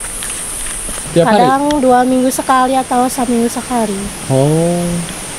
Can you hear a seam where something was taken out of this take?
yes; 1 cut; at 1.0 s

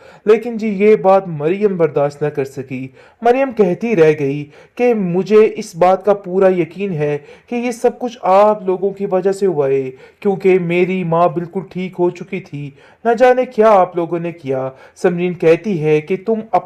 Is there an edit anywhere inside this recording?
no; 0 cuts

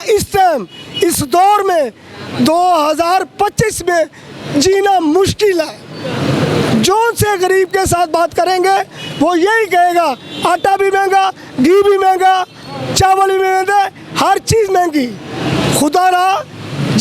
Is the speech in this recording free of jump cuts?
yes; 0 cuts

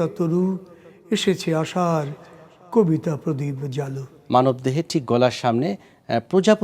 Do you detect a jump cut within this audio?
yes; 1 cut; at 4.1 s

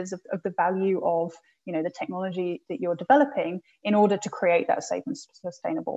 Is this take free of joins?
yes; 0 cuts

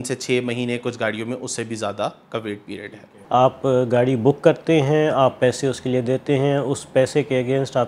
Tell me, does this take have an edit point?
yes; 1 cut; at 3.2 s

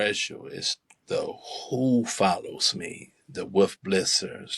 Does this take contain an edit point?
no; 0 cuts

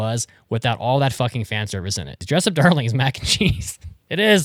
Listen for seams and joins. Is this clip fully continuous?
no; 1 cut; at 2.2 s

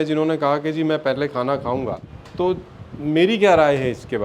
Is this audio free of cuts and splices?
no; 1 cut; at 2.2 s

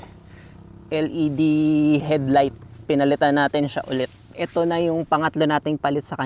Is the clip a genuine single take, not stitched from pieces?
no; 2 cuts; at 2.0 s, 4.3 s

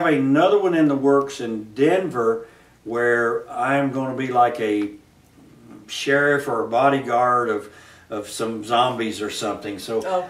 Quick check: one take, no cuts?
no; 1 cut; at 3.7 s

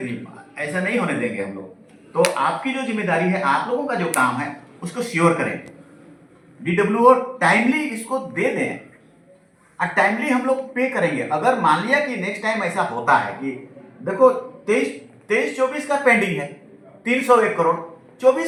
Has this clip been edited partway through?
no; 0 cuts

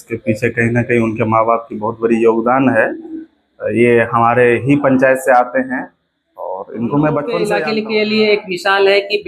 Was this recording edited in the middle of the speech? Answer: yes; 1 cut; at 7.5 s

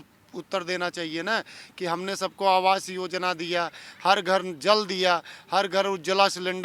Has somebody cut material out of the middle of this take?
no; 0 cuts

